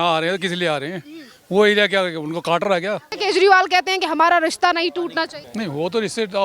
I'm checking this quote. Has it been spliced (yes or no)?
yes